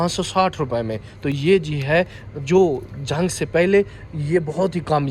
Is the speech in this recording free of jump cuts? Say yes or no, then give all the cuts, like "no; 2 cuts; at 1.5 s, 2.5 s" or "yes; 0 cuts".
yes; 0 cuts